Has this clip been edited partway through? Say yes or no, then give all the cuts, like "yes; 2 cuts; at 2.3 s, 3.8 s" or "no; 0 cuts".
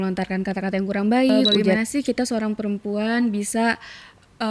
yes; 1 cut; at 1.7 s